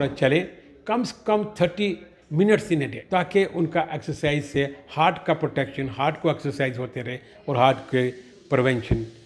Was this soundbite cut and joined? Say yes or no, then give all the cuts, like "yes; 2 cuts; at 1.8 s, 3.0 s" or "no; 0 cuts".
yes; 1 cut; at 3.0 s